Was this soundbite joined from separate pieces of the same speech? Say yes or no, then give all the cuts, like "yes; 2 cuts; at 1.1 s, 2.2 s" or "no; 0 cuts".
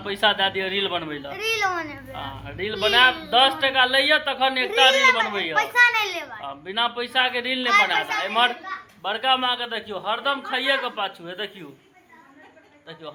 no; 0 cuts